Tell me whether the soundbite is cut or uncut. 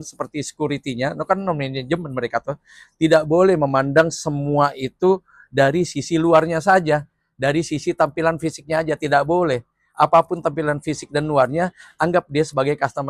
uncut